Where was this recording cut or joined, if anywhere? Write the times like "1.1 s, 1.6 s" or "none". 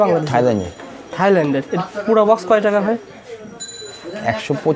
none